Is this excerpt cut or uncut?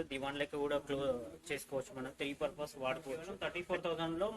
cut